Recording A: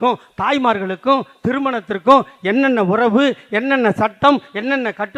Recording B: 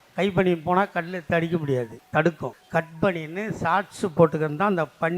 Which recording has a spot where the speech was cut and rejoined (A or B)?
B